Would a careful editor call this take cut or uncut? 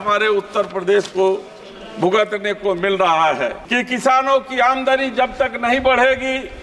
cut